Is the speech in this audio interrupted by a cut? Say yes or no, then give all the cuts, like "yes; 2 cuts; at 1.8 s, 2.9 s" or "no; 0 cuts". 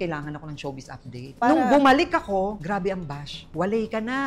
yes; 1 cut; at 1.2 s